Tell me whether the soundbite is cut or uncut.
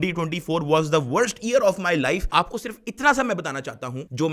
cut